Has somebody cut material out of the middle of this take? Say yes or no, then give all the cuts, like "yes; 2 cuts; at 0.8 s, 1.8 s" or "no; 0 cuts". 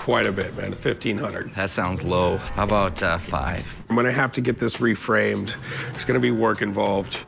no; 0 cuts